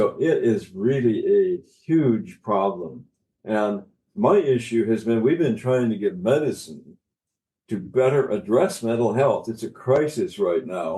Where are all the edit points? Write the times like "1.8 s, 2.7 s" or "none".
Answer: 4.0 s